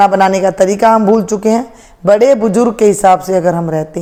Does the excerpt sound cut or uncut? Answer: uncut